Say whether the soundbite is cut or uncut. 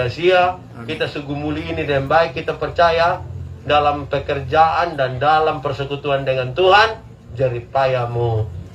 uncut